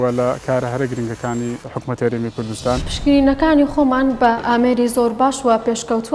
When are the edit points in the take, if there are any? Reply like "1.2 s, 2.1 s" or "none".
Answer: 1.6 s, 2.9 s, 4.4 s